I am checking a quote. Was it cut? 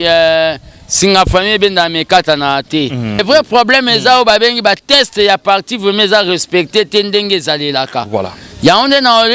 yes; 1 cut; at 3.2 s

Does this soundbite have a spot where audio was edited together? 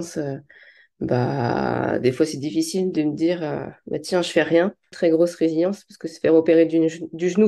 yes; 1 cut; at 4.9 s

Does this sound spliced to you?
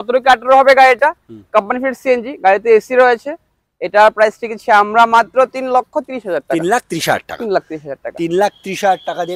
no; 0 cuts

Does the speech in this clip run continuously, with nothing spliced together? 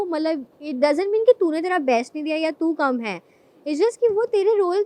yes; 0 cuts

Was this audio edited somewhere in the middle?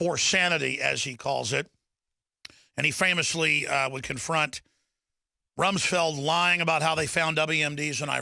no; 0 cuts

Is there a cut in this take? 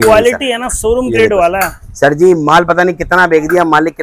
no; 0 cuts

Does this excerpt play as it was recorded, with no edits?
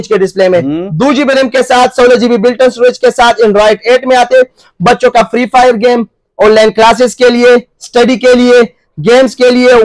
yes; 0 cuts

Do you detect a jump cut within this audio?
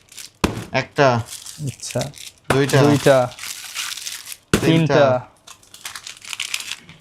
no; 0 cuts

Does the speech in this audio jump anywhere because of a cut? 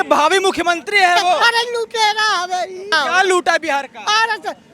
yes; 2 cuts; at 1.4 s, 2.9 s

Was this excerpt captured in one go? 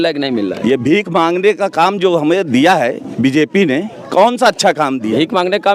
yes; 0 cuts

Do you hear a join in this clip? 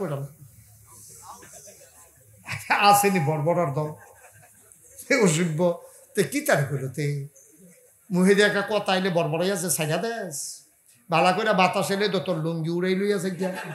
no; 0 cuts

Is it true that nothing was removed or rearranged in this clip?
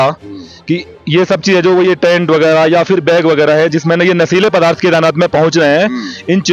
yes; 0 cuts

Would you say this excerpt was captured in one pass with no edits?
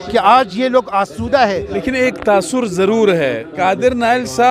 no; 2 cuts; at 1.7 s, 3.5 s

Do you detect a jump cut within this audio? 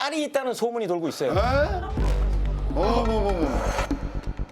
yes; 1 cut; at 1.8 s

